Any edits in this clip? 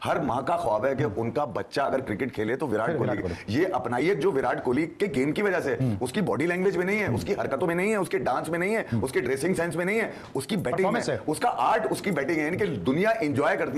no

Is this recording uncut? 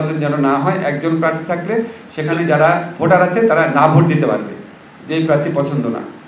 yes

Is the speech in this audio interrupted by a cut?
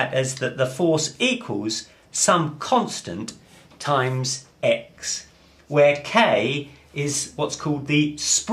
yes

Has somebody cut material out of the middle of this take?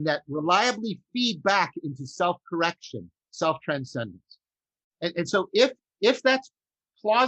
yes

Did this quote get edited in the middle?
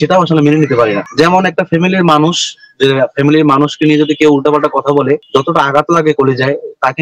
no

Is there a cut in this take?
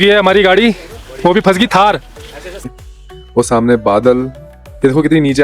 yes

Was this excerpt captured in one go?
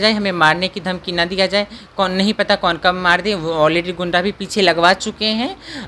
yes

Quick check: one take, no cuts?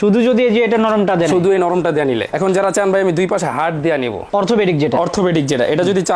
no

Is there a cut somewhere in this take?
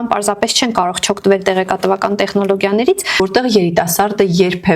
yes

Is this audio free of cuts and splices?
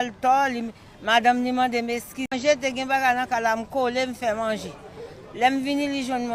no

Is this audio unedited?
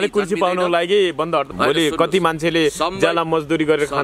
no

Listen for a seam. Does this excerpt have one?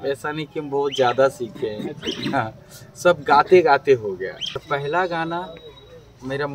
yes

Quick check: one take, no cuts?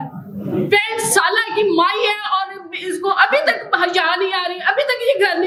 yes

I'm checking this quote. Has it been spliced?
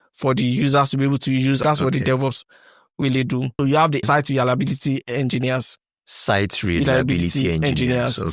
yes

